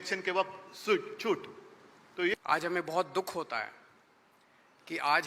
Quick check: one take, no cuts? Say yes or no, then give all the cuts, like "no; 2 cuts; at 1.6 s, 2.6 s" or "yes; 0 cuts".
no; 1 cut; at 2.3 s